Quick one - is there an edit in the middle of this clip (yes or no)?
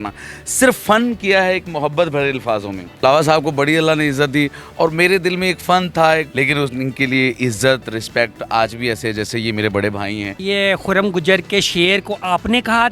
yes